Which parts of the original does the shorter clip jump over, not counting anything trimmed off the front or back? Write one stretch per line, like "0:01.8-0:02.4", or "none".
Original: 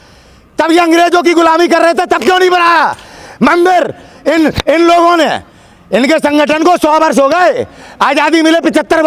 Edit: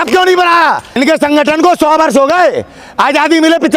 0:03.1-0:06.0

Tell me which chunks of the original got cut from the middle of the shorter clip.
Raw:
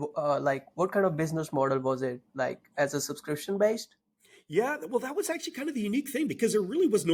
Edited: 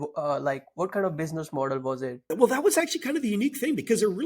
0:02.3-0:04.8

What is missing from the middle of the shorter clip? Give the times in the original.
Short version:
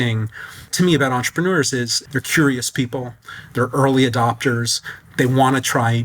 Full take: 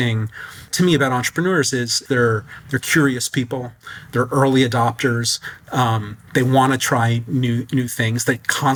0:01.9-0:02.5
0:05.5-0:06.1

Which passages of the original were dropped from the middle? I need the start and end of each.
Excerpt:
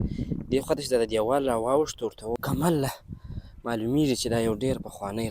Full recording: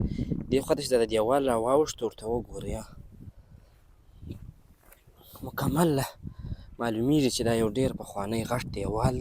0:02.4-0:05.5

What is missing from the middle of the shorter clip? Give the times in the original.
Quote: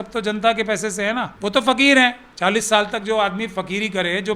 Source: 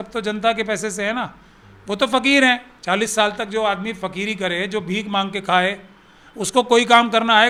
0:01.3-0:01.8

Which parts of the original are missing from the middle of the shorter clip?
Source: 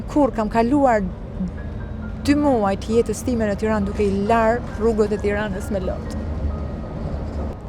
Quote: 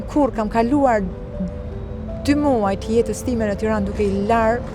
none

